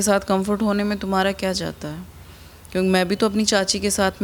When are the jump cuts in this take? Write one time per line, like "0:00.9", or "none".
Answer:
none